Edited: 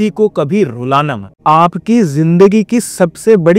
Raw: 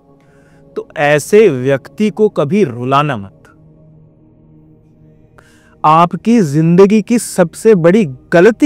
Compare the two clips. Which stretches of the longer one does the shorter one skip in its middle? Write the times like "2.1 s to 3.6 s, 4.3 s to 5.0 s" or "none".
3.3 s to 5.6 s